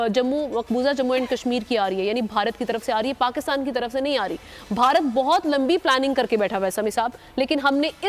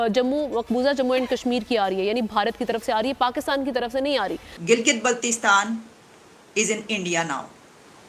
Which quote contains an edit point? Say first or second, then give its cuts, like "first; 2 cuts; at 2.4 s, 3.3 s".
second; 1 cut; at 4.5 s